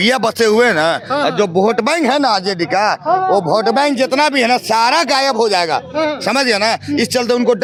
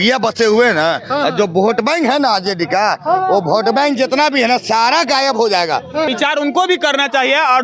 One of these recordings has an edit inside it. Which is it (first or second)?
second